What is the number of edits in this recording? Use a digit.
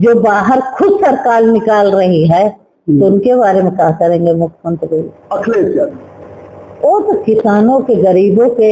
1